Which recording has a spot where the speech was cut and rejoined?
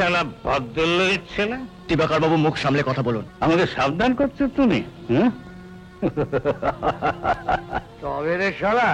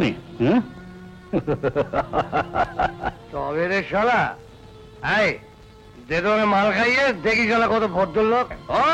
first; 1 cut; at 3.3 s

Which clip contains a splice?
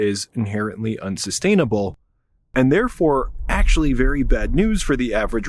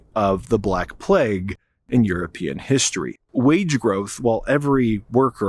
second; 1 cut; at 3.3 s

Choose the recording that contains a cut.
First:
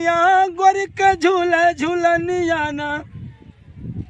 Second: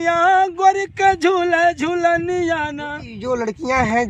second; 1 cut; at 3.1 s

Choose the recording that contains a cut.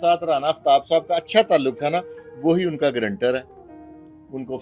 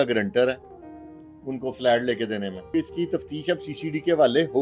second; 1 cut; at 2.7 s

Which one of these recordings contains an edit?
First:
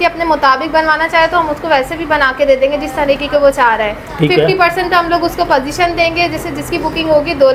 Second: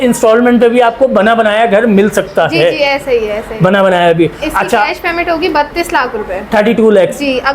second; 1 cut; at 4.9 s

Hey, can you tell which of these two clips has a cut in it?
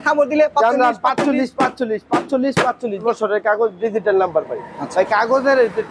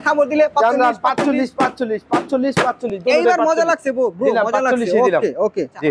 first; 1 cut; at 3.0 s

